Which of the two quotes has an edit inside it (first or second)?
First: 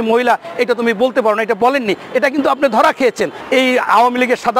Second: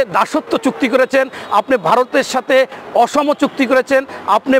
first